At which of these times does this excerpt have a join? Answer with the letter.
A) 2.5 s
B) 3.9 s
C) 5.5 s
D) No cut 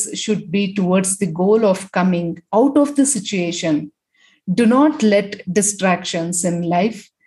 D